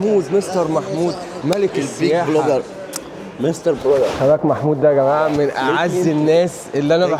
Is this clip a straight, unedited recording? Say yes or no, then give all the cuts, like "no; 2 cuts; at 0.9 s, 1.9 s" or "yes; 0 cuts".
yes; 0 cuts